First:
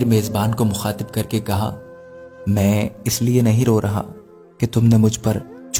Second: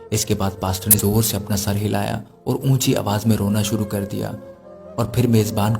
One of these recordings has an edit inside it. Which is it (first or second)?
second